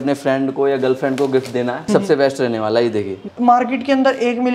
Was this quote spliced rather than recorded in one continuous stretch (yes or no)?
yes